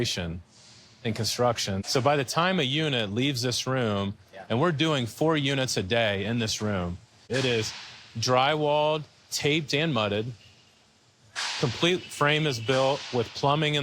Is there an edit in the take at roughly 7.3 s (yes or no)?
yes